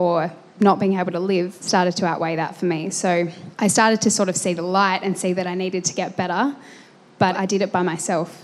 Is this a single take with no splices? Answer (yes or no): no